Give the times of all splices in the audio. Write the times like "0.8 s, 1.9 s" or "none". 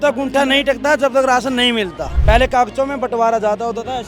2.1 s